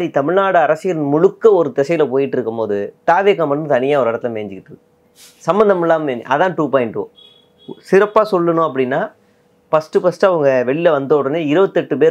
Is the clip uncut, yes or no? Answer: yes